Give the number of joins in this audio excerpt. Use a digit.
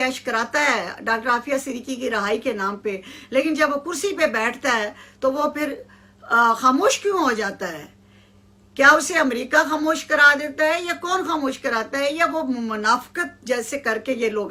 0